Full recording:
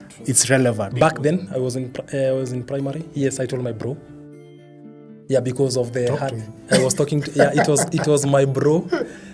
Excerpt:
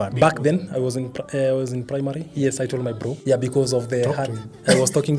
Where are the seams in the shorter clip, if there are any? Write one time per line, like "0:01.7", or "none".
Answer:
0:03.2